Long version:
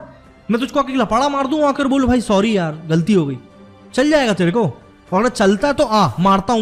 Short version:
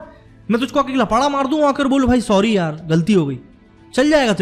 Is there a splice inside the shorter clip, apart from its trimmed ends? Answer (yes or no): no